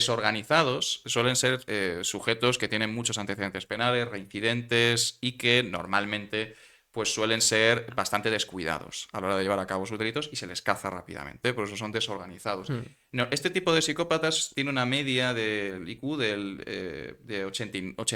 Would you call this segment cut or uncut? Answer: uncut